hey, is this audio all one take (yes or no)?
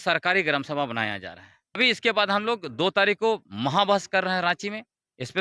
no